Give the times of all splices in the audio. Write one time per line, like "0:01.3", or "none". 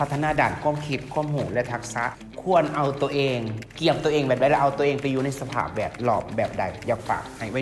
none